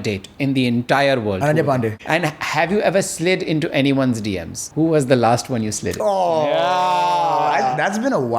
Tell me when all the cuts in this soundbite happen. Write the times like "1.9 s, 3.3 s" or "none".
2.0 s, 4.6 s